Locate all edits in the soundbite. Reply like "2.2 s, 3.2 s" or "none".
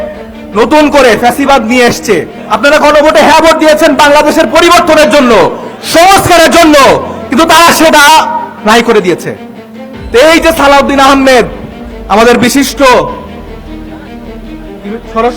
2.4 s